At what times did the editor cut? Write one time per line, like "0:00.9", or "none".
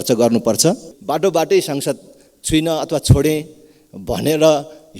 0:00.9